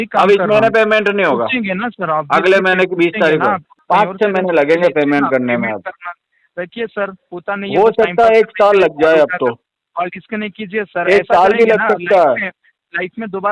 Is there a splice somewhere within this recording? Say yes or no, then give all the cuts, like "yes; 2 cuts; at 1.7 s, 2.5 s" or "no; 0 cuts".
yes; 1 cut; at 3.7 s